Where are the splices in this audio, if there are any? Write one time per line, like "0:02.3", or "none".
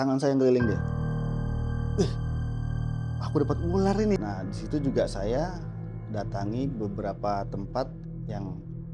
0:04.2